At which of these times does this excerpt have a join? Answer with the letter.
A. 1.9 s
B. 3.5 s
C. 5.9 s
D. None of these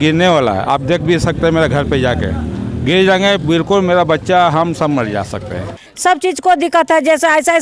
C